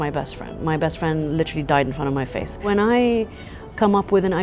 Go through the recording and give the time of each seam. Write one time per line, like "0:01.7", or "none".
0:02.7

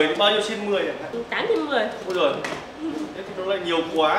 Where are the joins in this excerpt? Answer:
none

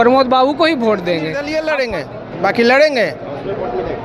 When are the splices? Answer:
0:01.4

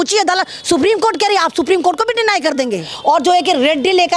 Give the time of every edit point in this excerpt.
0:02.9

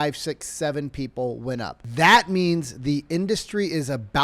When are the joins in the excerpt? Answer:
0:01.8

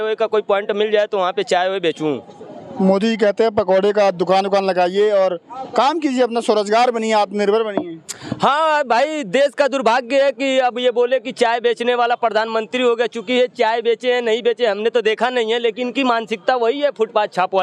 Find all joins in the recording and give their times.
none

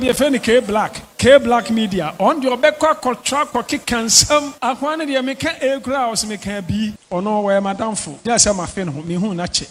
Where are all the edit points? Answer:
none

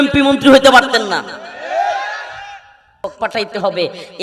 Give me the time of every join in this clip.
0:02.8

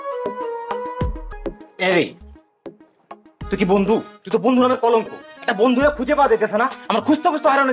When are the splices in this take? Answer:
0:01.3

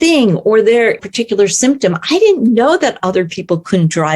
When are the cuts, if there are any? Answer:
0:01.0

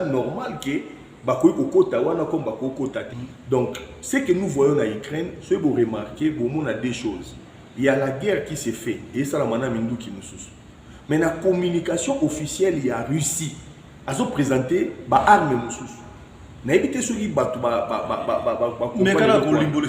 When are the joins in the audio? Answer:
0:03.1

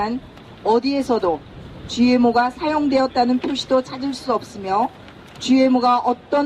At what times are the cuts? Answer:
0:03.7

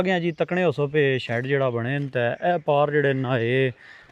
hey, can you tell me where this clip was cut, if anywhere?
none

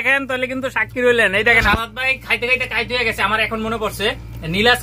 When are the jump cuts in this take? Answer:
0:01.6

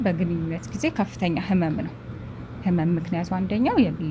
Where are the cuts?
none

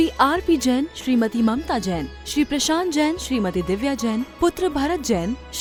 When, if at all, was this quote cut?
none

